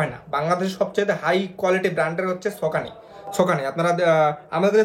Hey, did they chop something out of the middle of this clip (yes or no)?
no